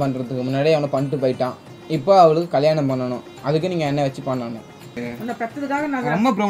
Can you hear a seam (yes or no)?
yes